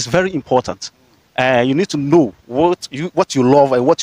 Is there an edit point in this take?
no; 0 cuts

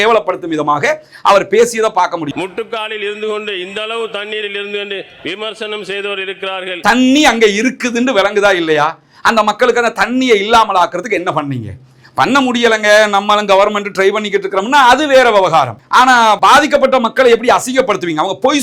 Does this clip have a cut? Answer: yes; 2 cuts; at 2.3 s, 6.8 s

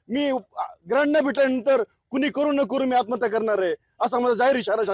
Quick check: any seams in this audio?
no; 0 cuts

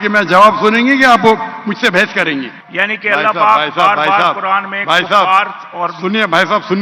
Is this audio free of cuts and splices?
no; 1 cut; at 2.6 s

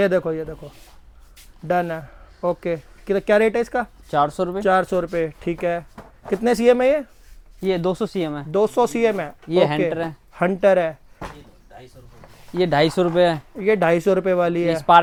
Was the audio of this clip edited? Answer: no; 0 cuts

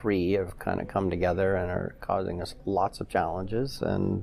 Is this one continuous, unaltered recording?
yes; 0 cuts

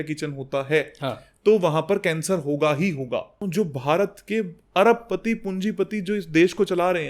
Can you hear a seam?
yes; 1 cut; at 3.3 s

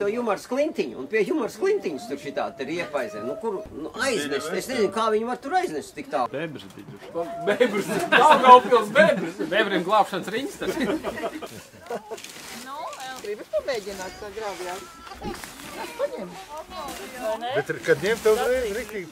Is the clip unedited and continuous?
no; 3 cuts; at 3.7 s, 6.3 s, 11.5 s

